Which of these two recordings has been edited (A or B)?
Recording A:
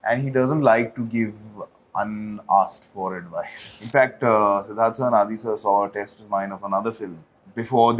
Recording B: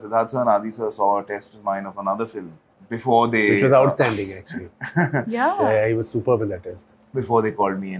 A